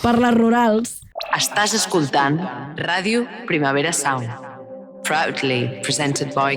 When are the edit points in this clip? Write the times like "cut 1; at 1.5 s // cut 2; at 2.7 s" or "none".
cut 1; at 1.1 s